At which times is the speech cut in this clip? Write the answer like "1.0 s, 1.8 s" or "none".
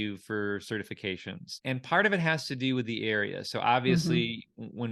1.5 s